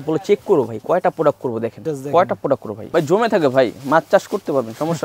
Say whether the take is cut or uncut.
cut